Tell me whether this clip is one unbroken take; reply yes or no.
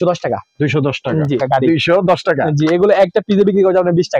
no